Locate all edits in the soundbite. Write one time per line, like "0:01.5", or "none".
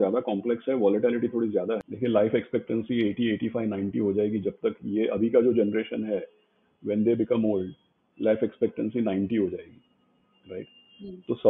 0:01.9